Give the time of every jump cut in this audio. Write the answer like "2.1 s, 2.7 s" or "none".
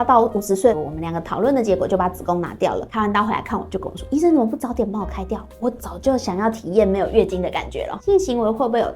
0.8 s, 2.9 s, 7.9 s